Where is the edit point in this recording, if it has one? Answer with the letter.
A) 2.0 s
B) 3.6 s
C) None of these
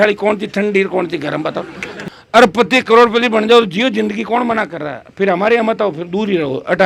A